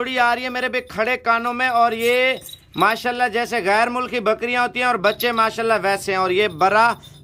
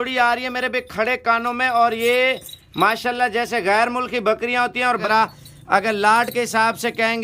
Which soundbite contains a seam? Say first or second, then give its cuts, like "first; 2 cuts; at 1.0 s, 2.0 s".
second; 1 cut; at 5.0 s